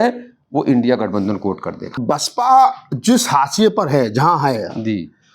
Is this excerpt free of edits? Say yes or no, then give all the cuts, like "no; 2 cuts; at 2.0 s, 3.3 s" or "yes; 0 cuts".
no; 1 cut; at 1.9 s